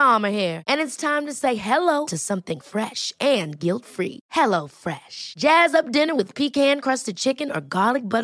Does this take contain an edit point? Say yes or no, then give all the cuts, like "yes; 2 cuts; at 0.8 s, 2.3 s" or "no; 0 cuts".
no; 0 cuts